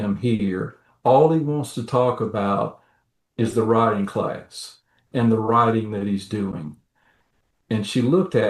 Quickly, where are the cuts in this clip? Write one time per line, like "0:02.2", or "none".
0:05.1